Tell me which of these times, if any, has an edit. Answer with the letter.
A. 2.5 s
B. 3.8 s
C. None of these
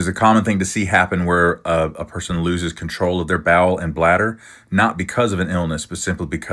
C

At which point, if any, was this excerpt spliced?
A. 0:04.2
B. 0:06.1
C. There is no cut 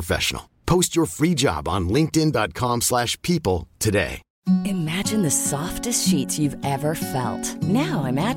A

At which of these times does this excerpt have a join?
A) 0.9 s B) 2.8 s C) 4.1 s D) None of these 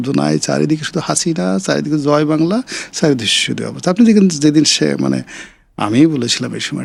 D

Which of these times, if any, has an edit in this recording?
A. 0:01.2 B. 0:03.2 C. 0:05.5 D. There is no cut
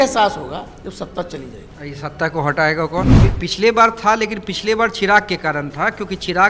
B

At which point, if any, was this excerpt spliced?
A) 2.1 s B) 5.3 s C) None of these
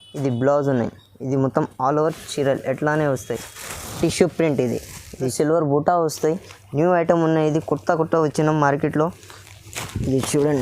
B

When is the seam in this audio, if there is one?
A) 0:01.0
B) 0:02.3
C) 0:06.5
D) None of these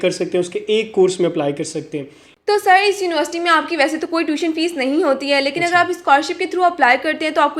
B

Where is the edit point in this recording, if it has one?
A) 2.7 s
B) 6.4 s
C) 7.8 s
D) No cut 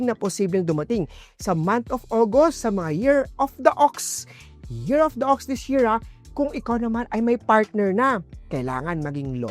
D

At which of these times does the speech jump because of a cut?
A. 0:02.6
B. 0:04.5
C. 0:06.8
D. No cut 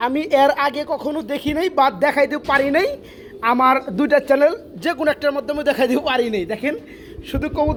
D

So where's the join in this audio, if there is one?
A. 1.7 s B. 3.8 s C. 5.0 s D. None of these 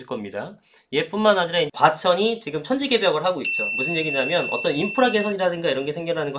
A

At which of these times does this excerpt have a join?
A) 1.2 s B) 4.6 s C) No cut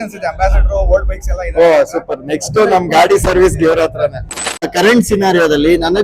B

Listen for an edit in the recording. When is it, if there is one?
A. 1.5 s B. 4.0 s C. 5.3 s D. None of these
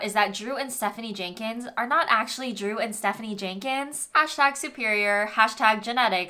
B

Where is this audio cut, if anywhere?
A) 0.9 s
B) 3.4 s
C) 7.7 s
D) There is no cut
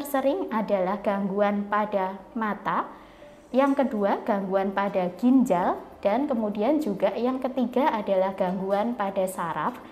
D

